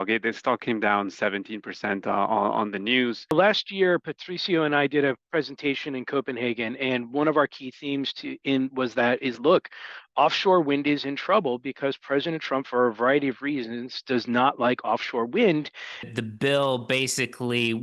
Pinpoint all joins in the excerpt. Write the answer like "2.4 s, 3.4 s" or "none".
3.3 s, 16.0 s